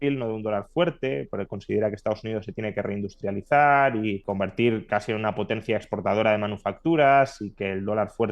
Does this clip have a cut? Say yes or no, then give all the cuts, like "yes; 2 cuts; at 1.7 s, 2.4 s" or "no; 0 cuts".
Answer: yes; 1 cut; at 4.2 s